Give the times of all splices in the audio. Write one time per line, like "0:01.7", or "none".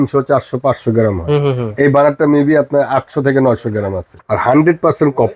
0:04.1